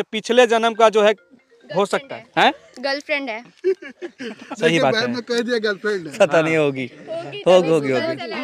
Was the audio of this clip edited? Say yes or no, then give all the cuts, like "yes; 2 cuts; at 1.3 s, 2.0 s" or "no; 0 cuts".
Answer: no; 0 cuts